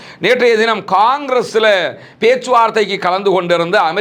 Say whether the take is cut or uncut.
uncut